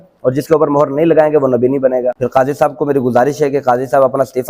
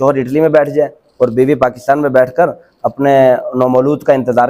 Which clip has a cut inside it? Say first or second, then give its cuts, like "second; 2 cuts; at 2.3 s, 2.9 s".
first; 1 cut; at 2.2 s